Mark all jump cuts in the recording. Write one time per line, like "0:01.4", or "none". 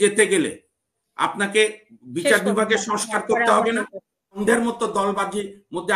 0:04.4